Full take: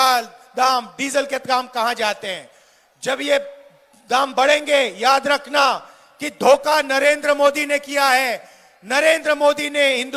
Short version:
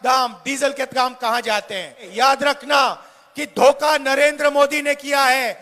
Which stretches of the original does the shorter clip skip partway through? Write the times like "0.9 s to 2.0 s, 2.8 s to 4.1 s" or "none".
2.6 s to 4.9 s